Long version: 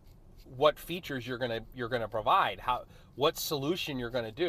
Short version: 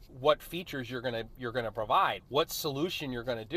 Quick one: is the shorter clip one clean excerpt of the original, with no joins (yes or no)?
no